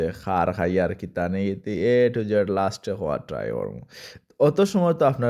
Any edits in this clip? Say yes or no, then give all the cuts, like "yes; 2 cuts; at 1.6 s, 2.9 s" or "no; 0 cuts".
no; 0 cuts